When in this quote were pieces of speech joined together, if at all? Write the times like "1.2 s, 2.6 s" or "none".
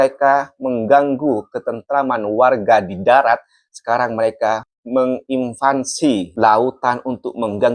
6.3 s

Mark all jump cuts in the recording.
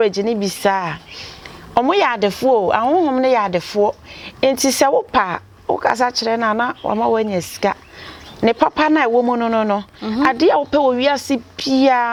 none

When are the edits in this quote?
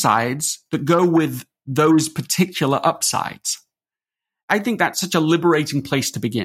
4.4 s

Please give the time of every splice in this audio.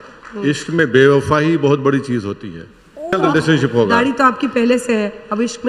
3.2 s

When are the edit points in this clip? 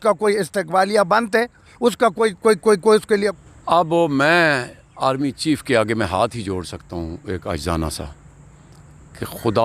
3.3 s

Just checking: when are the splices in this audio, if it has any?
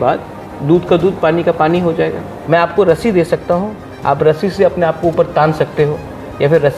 2.3 s

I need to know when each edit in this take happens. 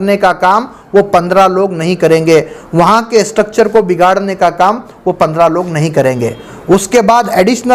none

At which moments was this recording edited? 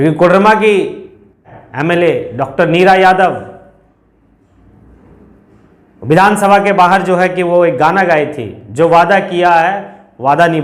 1.6 s

